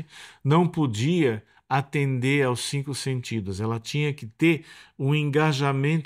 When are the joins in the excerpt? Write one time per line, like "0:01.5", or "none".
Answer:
none